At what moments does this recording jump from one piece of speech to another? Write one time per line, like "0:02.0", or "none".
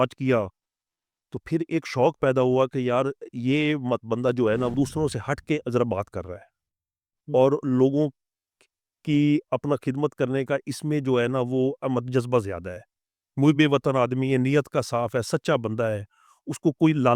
0:04.7